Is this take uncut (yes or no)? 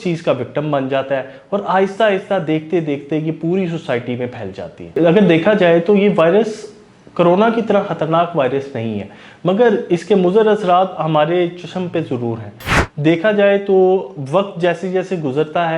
yes